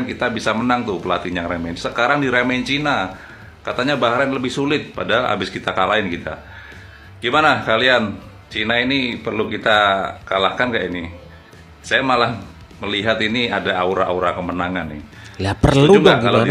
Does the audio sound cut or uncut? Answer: uncut